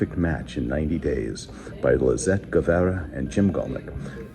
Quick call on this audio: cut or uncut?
cut